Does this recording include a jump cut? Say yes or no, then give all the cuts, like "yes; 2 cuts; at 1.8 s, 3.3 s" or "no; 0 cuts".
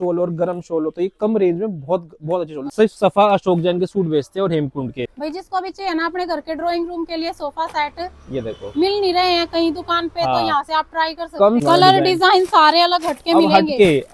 yes; 3 cuts; at 2.7 s, 5.1 s, 11.6 s